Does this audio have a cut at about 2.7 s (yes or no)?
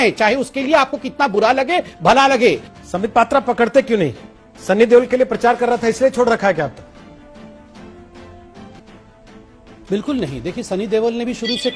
no